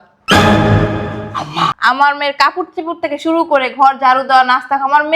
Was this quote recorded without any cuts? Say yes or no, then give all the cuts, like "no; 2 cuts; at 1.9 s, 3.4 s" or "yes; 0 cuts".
no; 1 cut; at 1.8 s